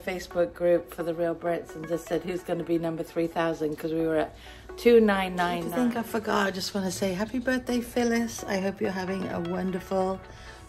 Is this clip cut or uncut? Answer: cut